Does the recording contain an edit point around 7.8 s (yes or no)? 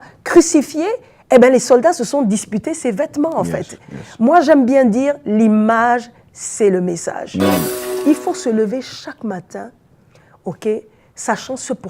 yes